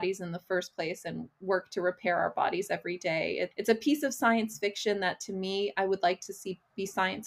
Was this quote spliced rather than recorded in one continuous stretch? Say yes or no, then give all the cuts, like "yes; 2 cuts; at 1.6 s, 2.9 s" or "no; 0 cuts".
yes; 1 cut; at 3.5 s